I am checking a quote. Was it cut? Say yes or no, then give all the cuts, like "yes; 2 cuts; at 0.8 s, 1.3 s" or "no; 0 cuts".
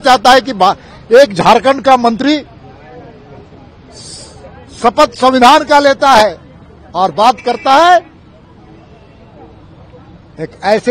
no; 0 cuts